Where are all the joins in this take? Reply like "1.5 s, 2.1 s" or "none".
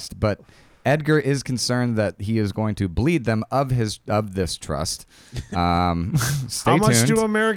none